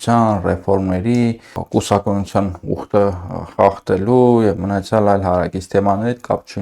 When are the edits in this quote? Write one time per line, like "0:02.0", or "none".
0:01.5